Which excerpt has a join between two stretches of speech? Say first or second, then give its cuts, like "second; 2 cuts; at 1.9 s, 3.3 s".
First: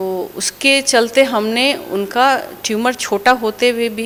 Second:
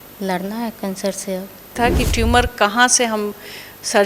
second; 1 cut; at 1.8 s